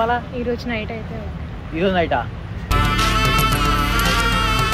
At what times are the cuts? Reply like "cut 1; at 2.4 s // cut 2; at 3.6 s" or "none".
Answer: none